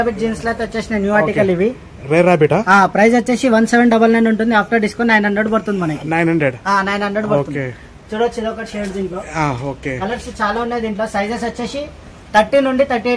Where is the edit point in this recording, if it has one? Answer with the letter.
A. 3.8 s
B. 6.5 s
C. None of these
C